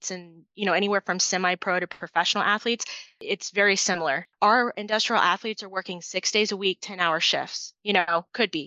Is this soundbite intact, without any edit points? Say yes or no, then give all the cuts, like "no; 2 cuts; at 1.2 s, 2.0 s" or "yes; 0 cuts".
no; 2 cuts; at 3.1 s, 4.3 s